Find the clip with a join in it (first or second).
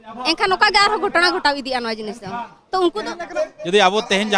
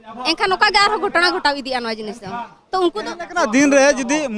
first